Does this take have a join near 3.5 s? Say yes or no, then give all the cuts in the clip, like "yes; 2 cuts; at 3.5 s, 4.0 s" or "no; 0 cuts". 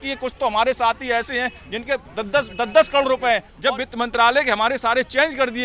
yes; 1 cut; at 3.5 s